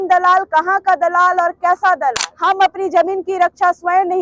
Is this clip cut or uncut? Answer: cut